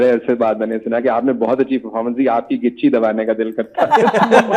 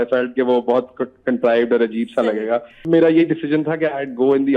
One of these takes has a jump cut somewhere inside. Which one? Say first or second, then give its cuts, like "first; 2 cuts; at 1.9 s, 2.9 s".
second; 1 cut; at 2.7 s